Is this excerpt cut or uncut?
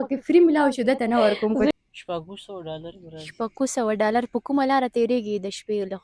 cut